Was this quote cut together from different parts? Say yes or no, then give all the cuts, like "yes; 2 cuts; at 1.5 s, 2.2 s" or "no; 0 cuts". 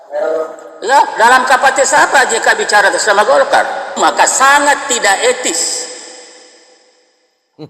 yes; 1 cut; at 4.0 s